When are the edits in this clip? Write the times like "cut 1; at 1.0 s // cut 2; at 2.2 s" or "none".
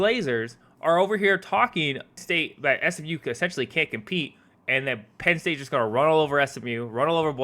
cut 1; at 2.1 s